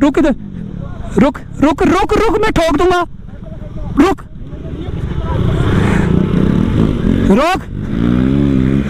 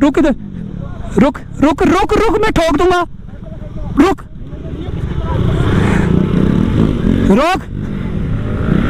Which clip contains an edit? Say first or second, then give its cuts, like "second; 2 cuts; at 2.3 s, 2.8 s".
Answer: first; 1 cut; at 8.0 s